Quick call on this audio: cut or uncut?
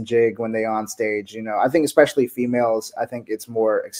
uncut